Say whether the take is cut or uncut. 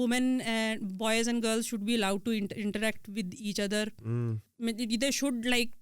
cut